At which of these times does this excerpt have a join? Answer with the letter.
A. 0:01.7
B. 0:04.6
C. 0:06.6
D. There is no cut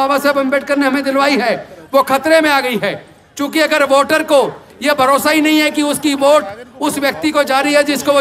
D